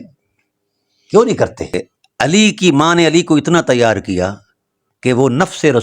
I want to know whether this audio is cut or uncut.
cut